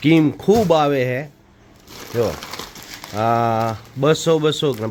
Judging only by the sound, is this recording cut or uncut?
uncut